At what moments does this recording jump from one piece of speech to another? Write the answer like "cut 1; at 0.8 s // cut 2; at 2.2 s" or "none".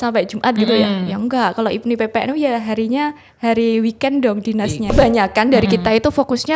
cut 1; at 4.9 s